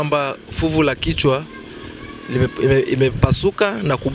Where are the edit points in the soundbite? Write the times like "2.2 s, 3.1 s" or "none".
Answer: none